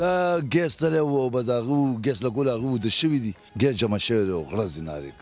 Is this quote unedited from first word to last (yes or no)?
no